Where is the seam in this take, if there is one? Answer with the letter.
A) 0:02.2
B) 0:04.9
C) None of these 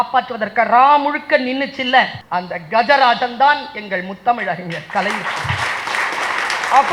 A